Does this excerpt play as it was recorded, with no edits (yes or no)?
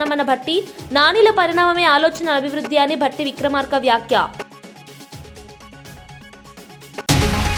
yes